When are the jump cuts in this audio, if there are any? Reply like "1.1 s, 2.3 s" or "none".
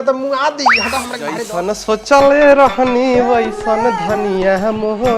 1.5 s

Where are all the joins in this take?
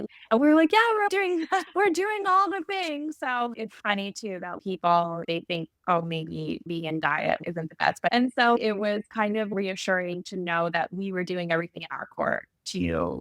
8.1 s

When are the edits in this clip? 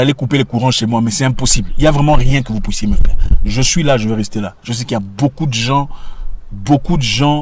none

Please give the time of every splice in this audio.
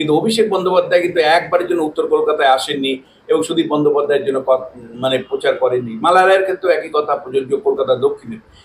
none

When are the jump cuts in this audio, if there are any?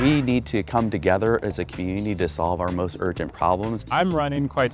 3.8 s

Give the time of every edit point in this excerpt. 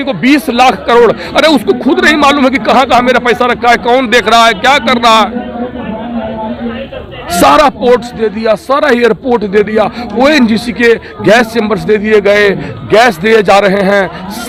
none

